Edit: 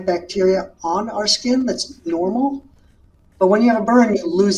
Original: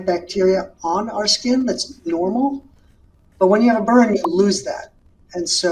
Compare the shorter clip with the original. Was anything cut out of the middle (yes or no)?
no